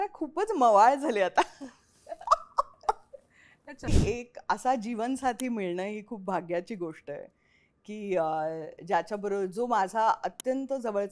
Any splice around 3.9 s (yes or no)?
yes